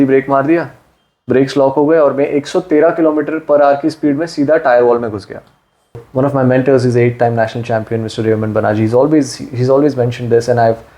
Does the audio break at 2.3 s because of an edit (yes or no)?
no